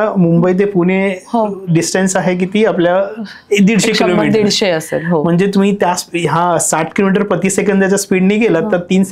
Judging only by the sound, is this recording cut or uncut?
uncut